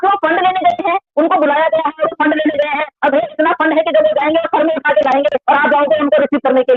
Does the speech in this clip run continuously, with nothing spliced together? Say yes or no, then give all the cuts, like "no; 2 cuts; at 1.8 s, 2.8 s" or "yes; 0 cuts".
yes; 0 cuts